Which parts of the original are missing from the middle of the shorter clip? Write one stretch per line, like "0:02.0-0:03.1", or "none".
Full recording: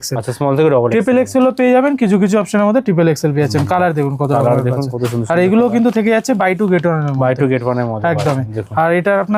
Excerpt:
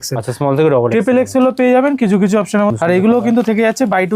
0:02.7-0:05.2